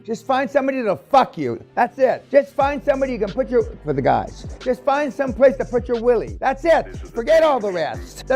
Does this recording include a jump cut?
no; 0 cuts

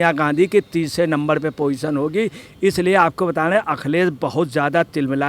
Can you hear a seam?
yes; 1 cut; at 2.5 s

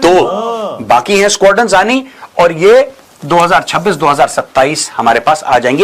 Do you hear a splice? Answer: no; 0 cuts

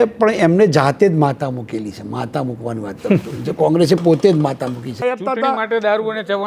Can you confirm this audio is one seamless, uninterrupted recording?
no; 1 cut; at 4.9 s

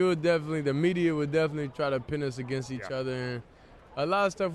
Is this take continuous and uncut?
yes; 0 cuts

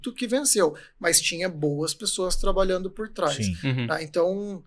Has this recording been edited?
no; 0 cuts

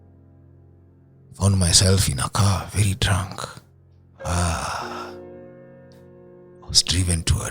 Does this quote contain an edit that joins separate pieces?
no; 0 cuts

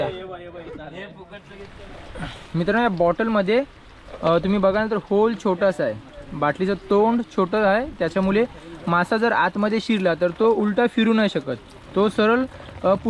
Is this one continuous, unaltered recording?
no; 1 cut; at 1.5 s

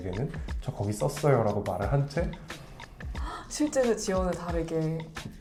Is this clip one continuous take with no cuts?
yes; 0 cuts

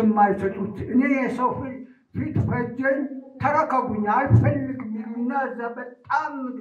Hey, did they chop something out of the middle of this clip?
no; 0 cuts

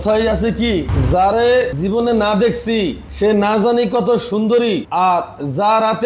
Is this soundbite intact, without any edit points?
no; 3 cuts; at 0.9 s, 1.7 s, 3.0 s

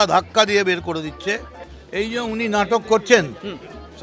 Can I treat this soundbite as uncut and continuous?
no; 1 cut; at 1.5 s

